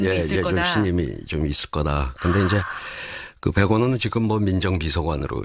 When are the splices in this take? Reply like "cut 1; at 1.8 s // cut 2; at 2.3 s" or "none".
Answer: cut 1; at 3.3 s